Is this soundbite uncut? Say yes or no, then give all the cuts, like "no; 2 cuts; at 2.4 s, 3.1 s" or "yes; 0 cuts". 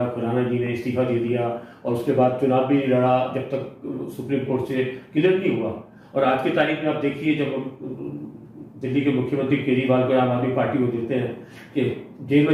yes; 0 cuts